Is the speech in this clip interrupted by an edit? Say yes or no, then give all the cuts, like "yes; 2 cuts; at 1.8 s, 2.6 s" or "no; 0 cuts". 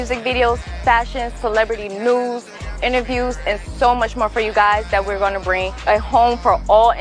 no; 0 cuts